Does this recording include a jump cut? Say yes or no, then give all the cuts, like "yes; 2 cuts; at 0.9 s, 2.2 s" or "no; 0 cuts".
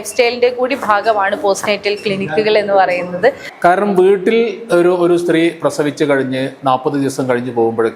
yes; 1 cut; at 3.5 s